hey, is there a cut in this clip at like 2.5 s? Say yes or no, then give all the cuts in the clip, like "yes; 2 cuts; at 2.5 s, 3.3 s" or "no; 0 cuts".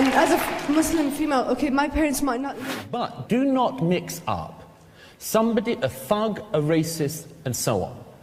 yes; 1 cut; at 2.5 s